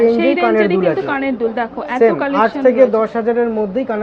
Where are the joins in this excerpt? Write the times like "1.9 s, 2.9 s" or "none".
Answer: none